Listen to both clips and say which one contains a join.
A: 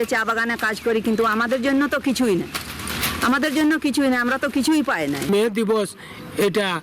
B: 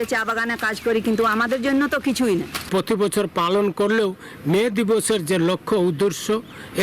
B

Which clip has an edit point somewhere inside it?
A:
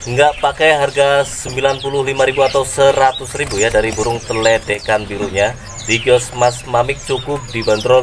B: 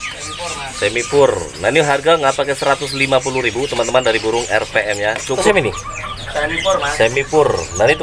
B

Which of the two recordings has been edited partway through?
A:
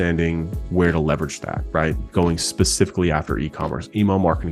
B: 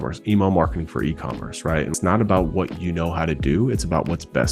B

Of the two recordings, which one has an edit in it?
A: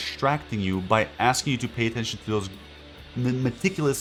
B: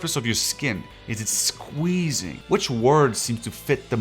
B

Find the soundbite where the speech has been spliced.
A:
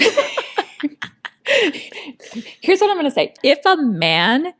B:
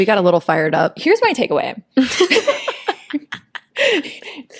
A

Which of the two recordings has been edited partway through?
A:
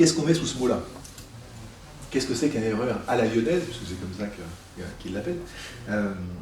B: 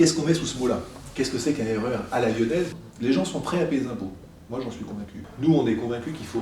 B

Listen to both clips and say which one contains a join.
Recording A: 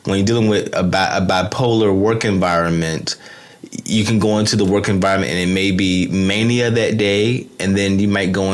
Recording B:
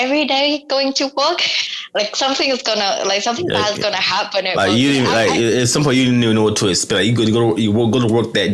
B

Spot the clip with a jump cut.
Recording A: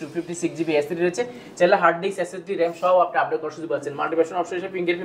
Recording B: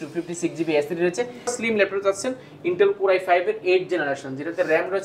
B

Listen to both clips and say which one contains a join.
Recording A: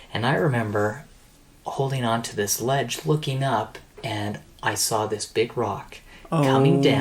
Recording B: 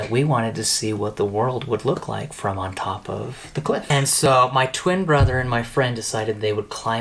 B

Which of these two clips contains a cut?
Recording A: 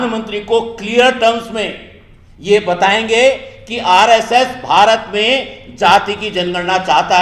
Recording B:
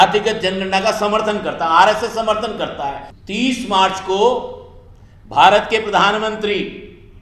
B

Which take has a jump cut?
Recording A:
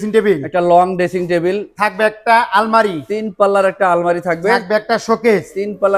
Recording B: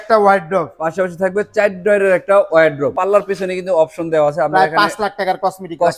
B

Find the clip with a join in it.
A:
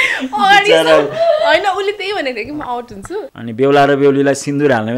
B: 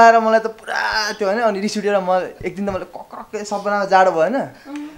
A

